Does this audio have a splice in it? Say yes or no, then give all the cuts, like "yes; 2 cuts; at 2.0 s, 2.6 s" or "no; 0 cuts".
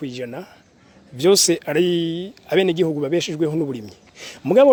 no; 0 cuts